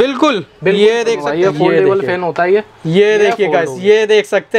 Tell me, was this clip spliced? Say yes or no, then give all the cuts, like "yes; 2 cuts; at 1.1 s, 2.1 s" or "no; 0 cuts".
yes; 1 cut; at 1.3 s